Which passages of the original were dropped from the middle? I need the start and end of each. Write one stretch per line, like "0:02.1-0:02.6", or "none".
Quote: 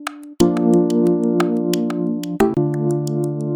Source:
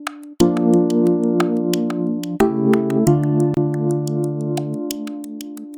0:02.5-0:03.5